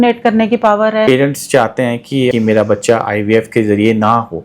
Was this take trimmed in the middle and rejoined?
yes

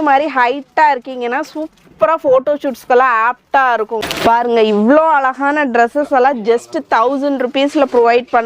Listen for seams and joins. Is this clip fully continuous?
no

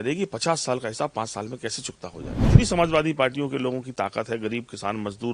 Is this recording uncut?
no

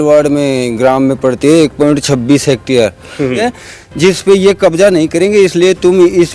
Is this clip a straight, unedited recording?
no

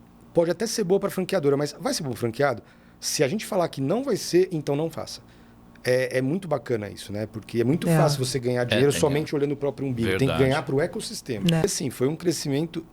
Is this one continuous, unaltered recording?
no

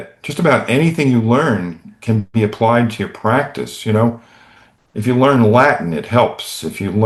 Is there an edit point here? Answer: no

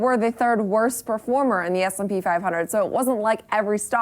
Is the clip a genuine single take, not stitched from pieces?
yes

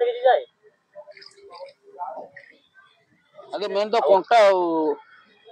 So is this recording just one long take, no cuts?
no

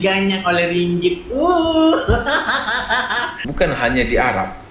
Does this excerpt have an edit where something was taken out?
yes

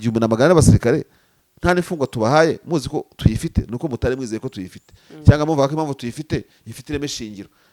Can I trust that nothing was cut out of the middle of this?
yes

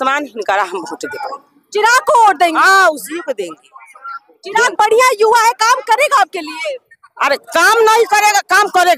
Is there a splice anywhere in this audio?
no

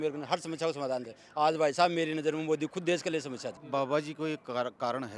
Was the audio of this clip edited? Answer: yes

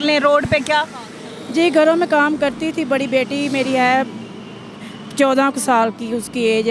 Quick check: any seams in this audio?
no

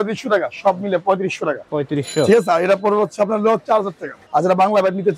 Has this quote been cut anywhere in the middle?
yes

